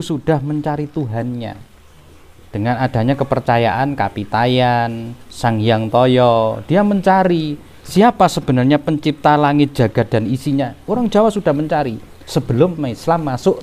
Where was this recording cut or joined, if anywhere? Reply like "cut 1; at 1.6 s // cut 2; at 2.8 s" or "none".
none